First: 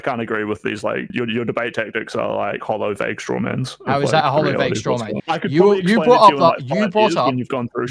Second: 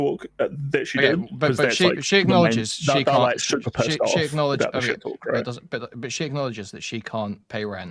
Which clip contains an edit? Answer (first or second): first